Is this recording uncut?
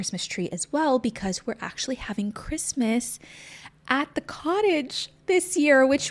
yes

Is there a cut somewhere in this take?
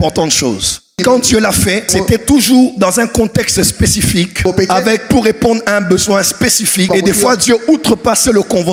no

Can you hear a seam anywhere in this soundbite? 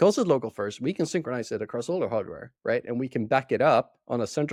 no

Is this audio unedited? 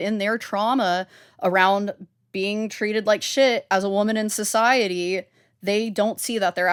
yes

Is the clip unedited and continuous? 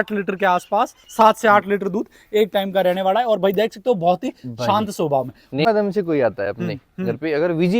no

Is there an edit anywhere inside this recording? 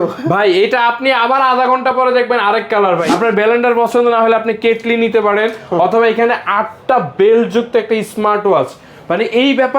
yes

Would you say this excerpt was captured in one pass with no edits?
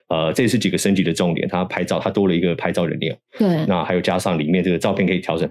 yes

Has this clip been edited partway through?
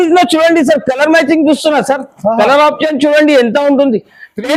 no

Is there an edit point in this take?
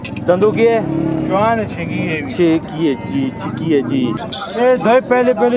yes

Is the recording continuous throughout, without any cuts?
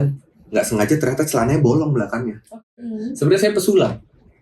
no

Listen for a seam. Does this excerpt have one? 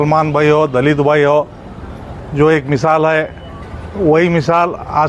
no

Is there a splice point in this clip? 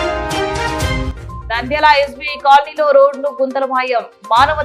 yes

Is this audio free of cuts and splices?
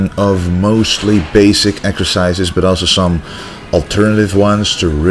no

